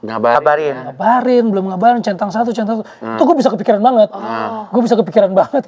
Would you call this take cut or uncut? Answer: uncut